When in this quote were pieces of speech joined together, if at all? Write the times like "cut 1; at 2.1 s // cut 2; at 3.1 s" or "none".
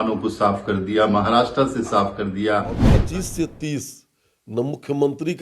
cut 1; at 2.9 s